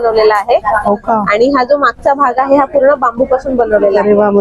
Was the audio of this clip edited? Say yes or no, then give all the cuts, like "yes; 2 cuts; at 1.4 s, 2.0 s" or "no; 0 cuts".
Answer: no; 0 cuts